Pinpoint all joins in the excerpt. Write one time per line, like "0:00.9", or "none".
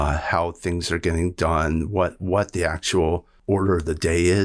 0:03.3